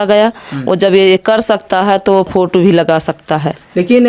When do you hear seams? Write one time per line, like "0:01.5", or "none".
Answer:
none